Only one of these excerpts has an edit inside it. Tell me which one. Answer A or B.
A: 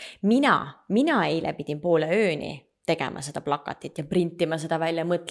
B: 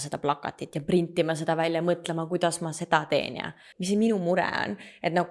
B